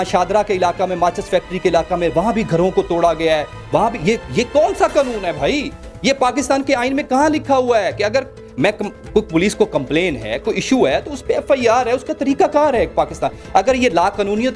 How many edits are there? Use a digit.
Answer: 0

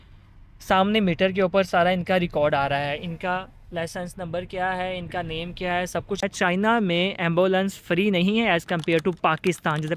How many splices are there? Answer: 1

